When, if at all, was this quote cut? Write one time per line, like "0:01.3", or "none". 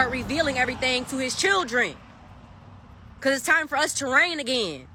none